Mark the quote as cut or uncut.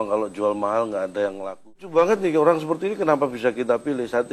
cut